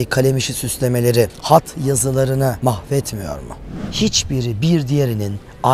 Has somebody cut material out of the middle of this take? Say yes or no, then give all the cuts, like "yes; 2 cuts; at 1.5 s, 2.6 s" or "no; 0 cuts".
yes; 3 cuts; at 1.4 s, 2.6 s, 3.8 s